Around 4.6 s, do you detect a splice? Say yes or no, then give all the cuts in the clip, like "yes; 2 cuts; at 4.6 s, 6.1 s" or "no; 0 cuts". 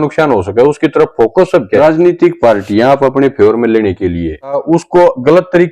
yes; 2 cuts; at 1.8 s, 4.6 s